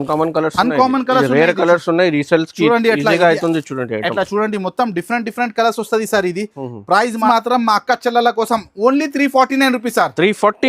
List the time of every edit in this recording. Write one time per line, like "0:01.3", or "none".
0:07.3

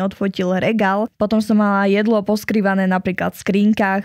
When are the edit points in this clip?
0:01.1

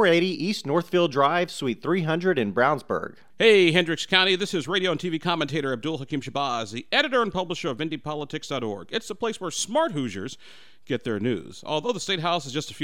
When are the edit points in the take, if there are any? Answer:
0:03.2

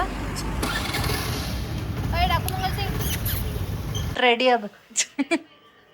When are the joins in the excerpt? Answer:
0:04.1

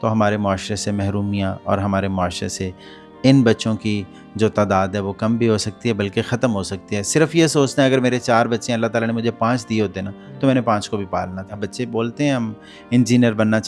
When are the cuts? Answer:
0:11.6

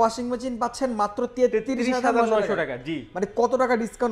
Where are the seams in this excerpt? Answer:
none

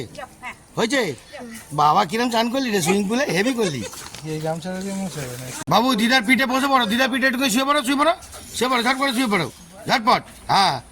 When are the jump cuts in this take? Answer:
0:05.6

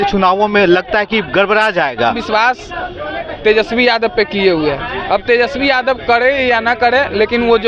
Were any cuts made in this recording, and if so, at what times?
0:02.2

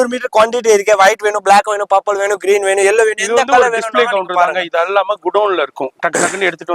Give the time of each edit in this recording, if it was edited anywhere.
none

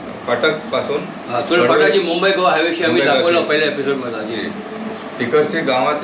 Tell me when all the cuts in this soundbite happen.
none

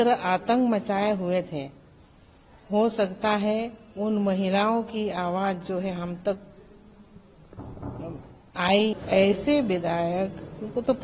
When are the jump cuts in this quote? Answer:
0:08.9

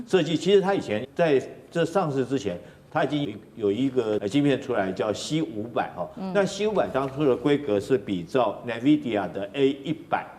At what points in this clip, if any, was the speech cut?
0:01.1
0:03.2
0:04.2

